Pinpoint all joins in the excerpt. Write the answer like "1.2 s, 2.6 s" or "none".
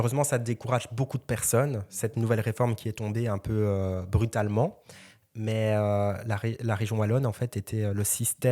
none